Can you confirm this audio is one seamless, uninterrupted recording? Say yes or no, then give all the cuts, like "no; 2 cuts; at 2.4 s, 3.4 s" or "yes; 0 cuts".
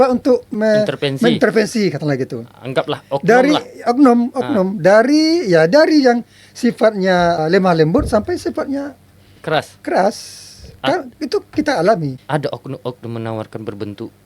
no; 1 cut; at 12.2 s